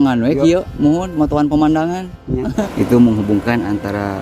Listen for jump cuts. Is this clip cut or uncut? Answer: cut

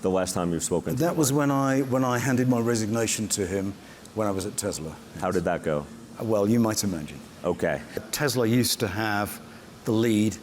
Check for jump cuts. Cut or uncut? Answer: cut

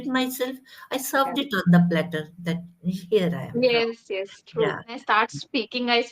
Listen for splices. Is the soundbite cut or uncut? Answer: cut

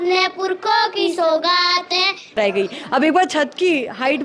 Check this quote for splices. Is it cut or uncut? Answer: cut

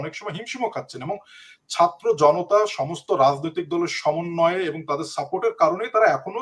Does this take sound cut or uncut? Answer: uncut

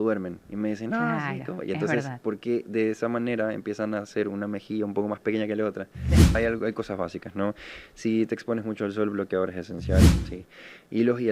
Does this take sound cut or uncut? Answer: cut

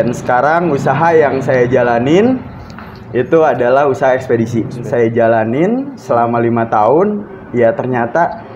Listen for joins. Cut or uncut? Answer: cut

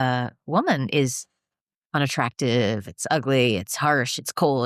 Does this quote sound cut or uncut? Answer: uncut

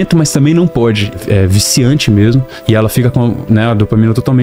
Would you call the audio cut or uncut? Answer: cut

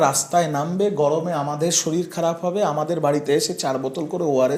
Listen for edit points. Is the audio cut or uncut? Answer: uncut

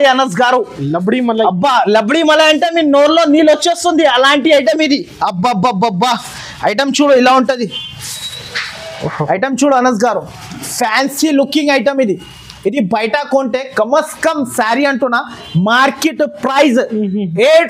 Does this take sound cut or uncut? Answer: uncut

